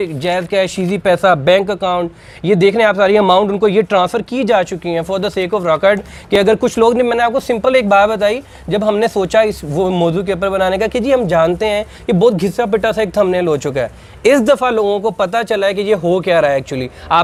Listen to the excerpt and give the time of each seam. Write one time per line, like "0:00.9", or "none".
none